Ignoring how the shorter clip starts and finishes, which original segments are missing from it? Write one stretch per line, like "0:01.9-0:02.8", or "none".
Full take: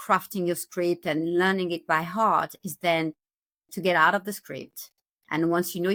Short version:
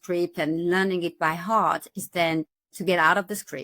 0:03.3-0:03.6